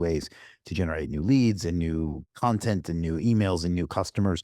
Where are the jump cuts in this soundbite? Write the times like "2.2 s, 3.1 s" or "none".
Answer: 2.2 s